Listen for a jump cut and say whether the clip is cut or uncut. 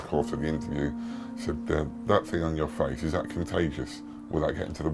uncut